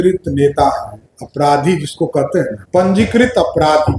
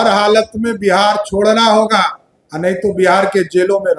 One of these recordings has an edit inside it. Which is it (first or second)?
first